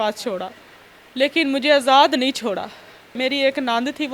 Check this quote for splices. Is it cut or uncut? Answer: cut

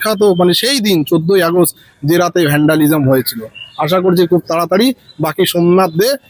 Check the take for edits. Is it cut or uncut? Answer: uncut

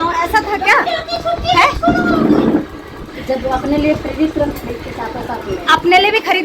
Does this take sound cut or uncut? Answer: uncut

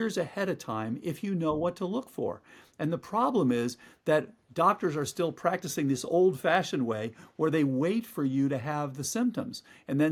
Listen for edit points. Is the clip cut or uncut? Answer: uncut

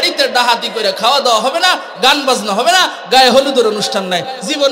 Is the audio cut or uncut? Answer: uncut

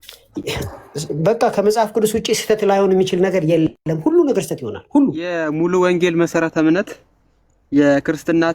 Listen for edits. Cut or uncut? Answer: cut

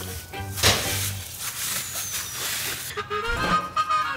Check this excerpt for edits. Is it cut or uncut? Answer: cut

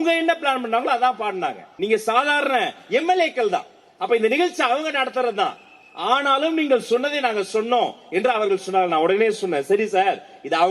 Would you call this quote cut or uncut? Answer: cut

